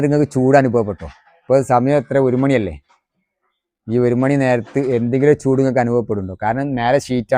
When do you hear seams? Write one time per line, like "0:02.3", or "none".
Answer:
none